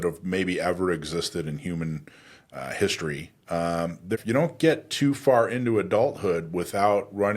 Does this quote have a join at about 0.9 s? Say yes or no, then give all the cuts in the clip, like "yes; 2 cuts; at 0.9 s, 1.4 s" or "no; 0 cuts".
no; 1 cut; at 4.2 s